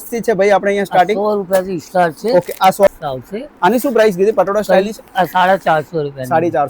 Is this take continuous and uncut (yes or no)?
no